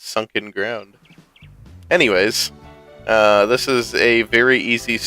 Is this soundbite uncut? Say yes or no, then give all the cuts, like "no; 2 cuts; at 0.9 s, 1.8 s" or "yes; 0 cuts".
no; 1 cut; at 1.9 s